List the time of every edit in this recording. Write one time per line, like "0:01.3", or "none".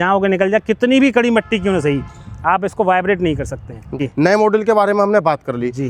0:04.0